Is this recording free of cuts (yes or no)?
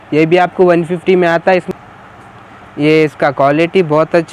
no